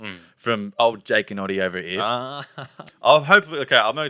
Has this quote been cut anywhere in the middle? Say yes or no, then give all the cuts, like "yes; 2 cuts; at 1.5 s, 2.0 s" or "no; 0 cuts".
yes; 1 cut; at 2.9 s